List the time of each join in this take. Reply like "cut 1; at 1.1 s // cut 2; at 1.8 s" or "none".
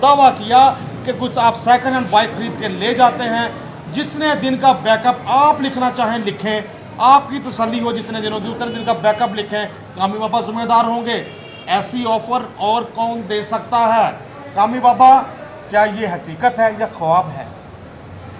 none